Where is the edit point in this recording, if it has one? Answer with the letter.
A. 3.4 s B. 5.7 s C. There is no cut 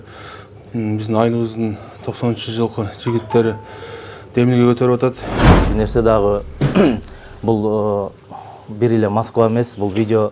B